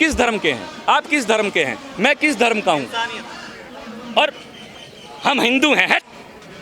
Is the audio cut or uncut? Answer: uncut